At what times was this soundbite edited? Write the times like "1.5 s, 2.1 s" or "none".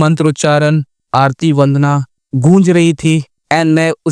none